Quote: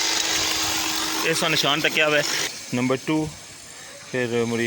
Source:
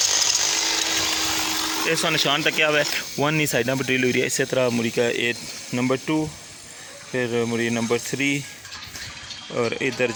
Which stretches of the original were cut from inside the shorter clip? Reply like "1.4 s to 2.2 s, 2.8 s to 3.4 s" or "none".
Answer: 3.0 s to 5.4 s